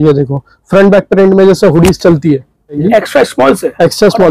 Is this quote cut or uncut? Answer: cut